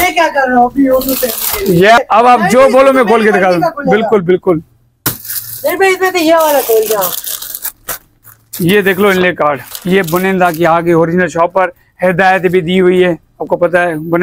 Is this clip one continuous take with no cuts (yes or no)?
no